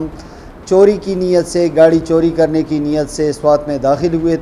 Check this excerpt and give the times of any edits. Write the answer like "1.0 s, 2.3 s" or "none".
none